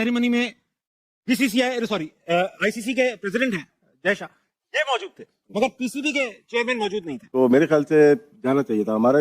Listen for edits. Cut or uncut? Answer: cut